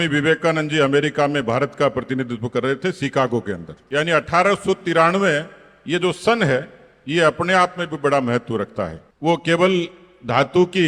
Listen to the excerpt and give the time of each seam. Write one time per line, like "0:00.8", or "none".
0:09.0